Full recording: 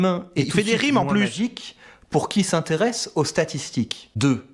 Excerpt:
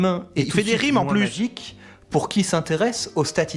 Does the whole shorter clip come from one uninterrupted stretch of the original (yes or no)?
yes